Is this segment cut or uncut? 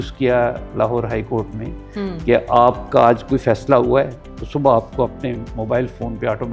uncut